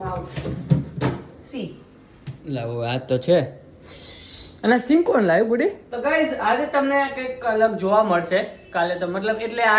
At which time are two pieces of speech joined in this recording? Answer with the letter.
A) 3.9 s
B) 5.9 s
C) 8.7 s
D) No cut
B